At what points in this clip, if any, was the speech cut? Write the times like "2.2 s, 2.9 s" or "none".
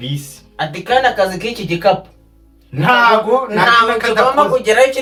none